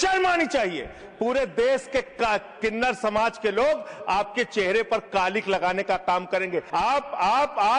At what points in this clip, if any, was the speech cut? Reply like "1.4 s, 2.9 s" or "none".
6.7 s